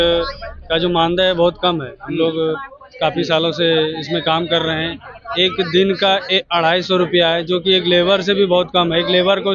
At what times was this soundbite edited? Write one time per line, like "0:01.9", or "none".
none